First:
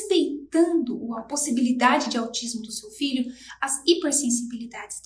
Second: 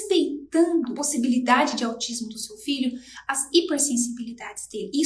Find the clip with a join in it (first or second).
second